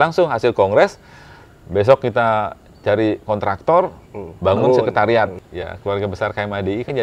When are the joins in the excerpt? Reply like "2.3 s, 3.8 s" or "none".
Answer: 5.3 s